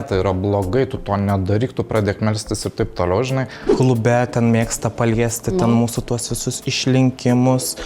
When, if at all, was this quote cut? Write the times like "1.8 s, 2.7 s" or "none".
3.6 s